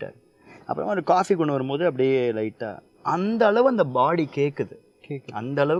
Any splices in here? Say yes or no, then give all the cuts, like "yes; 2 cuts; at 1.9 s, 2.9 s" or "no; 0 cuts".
no; 0 cuts